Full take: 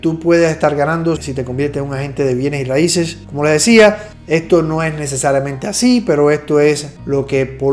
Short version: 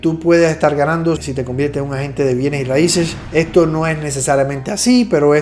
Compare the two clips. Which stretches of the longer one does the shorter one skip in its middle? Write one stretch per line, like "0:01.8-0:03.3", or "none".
0:03.2-0:04.1